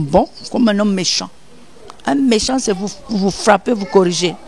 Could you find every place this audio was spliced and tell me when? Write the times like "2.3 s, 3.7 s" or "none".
none